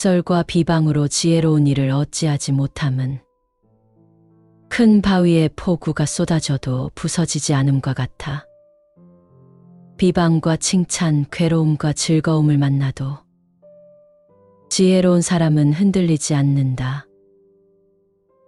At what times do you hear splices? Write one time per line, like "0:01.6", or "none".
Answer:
none